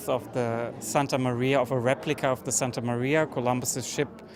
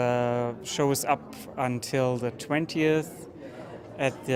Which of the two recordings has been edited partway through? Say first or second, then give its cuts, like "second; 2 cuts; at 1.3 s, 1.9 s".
second; 1 cut; at 2.1 s